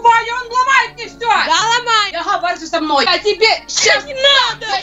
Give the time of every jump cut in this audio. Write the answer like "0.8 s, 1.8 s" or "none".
2.1 s, 3.1 s